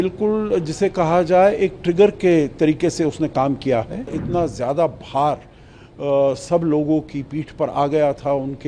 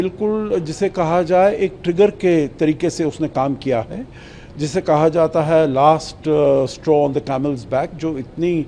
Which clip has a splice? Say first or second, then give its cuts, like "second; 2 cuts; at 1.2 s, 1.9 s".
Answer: first; 1 cut; at 4.2 s